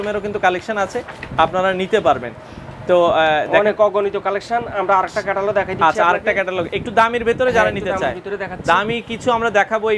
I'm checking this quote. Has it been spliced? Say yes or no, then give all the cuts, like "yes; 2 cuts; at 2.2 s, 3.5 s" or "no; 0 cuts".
no; 0 cuts